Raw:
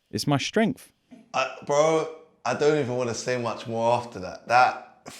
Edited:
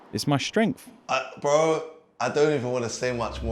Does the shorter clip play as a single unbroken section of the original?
no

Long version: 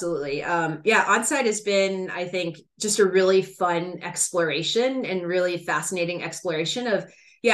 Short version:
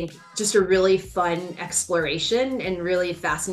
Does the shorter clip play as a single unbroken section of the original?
yes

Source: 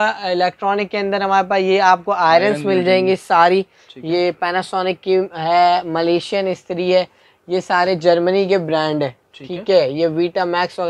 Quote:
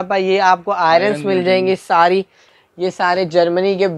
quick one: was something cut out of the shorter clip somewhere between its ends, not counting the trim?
yes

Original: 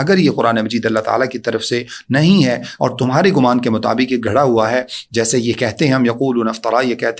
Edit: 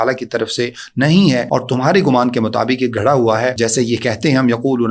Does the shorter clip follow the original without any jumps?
no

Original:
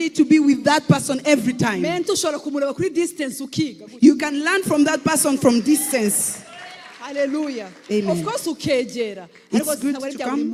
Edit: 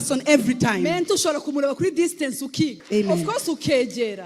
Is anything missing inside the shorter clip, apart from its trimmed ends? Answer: yes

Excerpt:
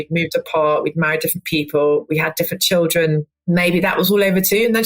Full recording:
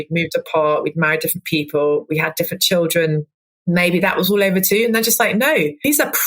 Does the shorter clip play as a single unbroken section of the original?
no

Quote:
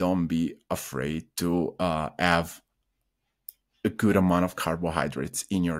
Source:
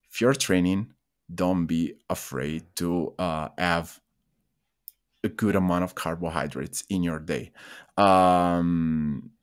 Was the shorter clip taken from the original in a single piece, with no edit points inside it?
yes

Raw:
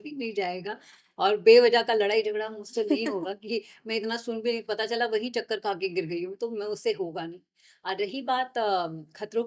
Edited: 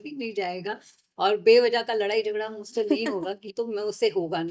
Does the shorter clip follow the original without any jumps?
no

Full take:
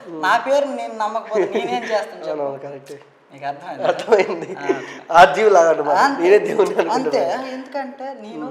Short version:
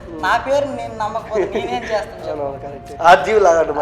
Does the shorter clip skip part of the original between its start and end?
yes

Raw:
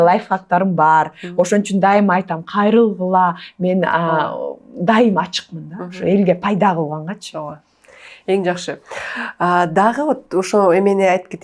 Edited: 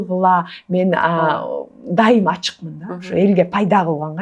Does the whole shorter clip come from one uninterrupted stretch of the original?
yes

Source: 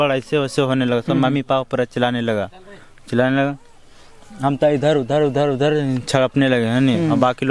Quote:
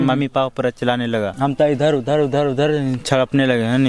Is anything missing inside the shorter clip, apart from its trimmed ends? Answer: yes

